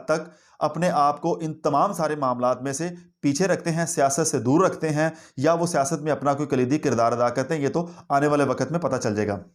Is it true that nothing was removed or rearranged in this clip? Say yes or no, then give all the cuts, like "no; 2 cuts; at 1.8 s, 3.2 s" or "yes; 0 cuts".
yes; 0 cuts